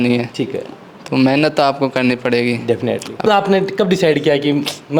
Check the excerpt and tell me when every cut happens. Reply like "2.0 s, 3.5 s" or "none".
3.2 s